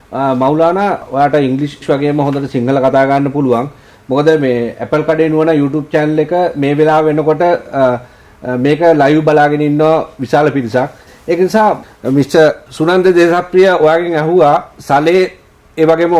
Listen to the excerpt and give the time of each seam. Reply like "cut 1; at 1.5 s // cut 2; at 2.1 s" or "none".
cut 1; at 11.8 s // cut 2; at 12.6 s